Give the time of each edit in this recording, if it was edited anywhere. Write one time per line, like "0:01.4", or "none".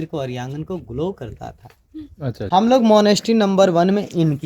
0:02.5